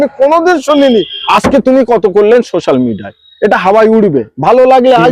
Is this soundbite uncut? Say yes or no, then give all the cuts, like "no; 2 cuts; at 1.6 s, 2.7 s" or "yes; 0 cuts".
no; 1 cut; at 1.2 s